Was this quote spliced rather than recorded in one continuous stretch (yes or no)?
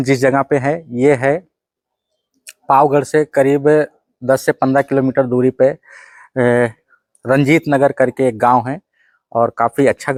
no